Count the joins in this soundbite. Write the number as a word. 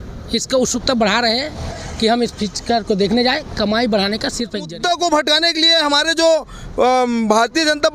one